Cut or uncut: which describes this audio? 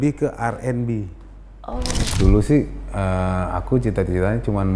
cut